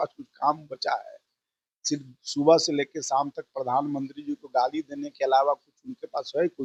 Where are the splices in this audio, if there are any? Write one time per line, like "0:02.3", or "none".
none